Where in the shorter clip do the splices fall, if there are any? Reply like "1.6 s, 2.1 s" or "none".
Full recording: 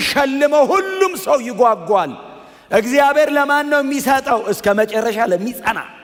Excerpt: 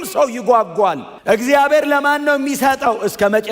1.1 s